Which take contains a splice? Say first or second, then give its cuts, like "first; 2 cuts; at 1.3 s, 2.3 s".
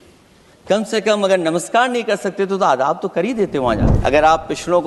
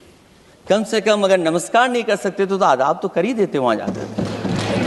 first; 1 cut; at 3.9 s